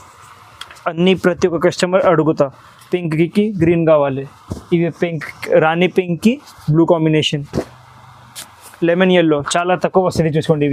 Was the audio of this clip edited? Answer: no; 0 cuts

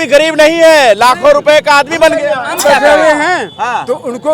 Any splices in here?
yes; 1 cut; at 2.4 s

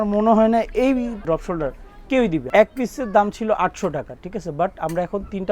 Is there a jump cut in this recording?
yes; 1 cut; at 2.5 s

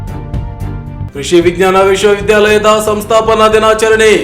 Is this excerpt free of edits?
yes; 0 cuts

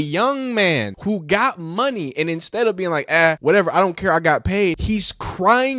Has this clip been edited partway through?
yes; 3 cuts; at 0.9 s, 3.4 s, 4.8 s

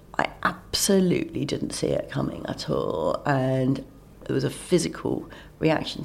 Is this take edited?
yes; 1 cut; at 4.2 s

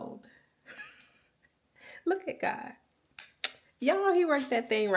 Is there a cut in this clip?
no; 0 cuts

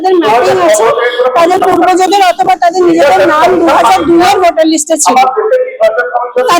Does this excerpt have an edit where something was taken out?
no; 0 cuts

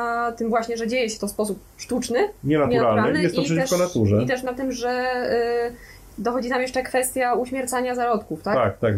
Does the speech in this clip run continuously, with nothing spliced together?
yes; 0 cuts

